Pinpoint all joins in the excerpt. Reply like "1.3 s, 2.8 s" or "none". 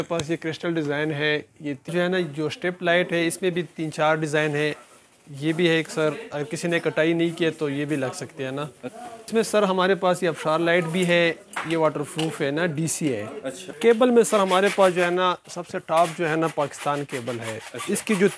1.9 s, 8.9 s, 13.6 s